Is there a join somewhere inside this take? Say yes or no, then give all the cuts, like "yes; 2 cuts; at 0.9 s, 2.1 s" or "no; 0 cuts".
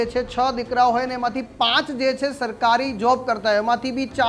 no; 0 cuts